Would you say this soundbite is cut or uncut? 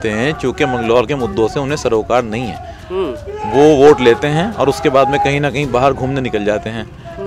uncut